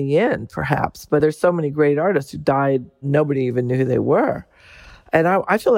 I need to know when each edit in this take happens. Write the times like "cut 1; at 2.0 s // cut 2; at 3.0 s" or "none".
cut 1; at 1.2 s // cut 2; at 3.0 s